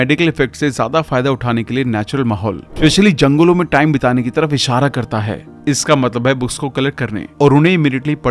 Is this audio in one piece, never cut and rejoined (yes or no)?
no